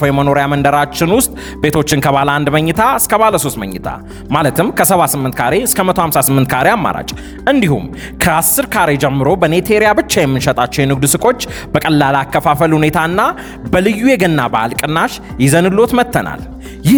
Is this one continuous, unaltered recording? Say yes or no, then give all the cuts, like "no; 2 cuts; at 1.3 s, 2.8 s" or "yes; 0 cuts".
yes; 0 cuts